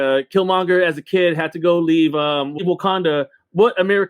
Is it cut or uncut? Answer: cut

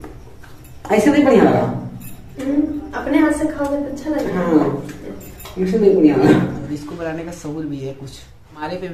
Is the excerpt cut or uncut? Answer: cut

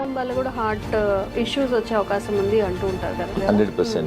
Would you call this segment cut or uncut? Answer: cut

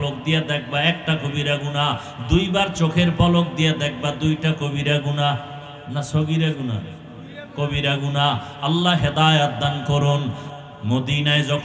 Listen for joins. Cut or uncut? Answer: cut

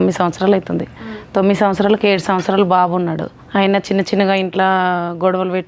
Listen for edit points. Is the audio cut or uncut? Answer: cut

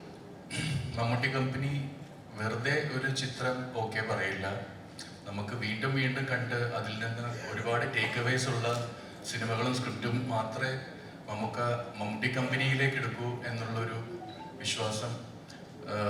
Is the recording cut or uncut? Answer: uncut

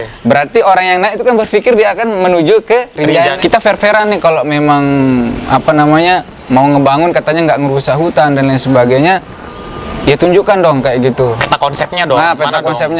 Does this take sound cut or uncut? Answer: cut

